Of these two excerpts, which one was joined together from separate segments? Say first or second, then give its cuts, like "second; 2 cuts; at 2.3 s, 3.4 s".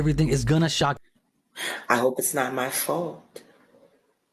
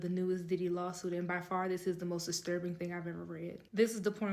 first; 1 cut; at 1.0 s